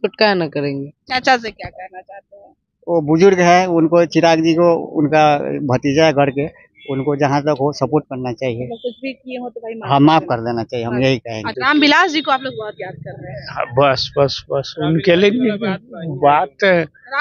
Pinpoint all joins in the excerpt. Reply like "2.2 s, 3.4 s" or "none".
0.9 s, 11.5 s